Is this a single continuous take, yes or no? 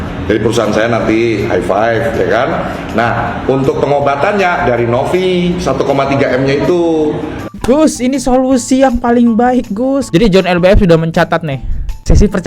no